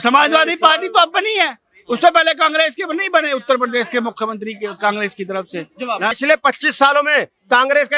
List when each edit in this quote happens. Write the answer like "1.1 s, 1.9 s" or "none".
6.2 s